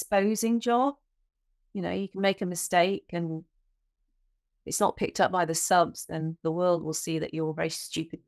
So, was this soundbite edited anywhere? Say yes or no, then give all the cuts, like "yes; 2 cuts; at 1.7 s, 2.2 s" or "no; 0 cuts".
no; 0 cuts